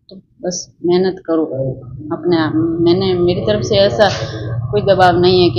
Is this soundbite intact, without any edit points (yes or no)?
yes